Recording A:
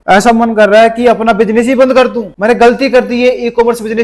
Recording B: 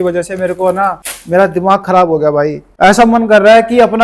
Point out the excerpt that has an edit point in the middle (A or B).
A